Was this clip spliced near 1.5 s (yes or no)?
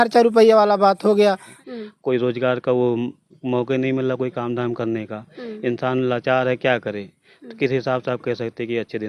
yes